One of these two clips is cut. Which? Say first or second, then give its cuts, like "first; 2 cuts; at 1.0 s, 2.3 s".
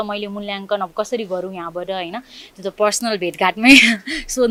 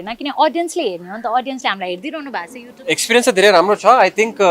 second; 1 cut; at 2.4 s